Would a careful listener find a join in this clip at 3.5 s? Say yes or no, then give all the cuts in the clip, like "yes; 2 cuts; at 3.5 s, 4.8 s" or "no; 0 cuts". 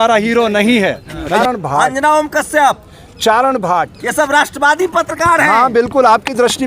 no; 1 cut; at 1.4 s